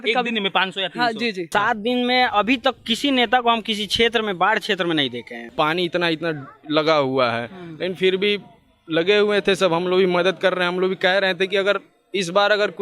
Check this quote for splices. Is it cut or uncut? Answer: cut